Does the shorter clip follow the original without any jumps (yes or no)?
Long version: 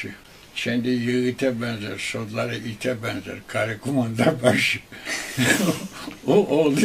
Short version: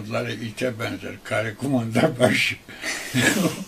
yes